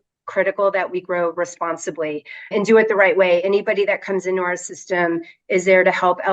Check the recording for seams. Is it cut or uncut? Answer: cut